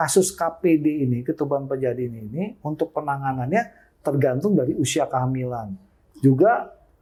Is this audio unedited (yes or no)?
yes